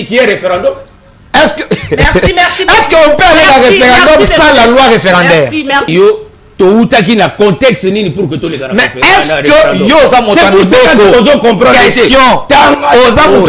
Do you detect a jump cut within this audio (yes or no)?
yes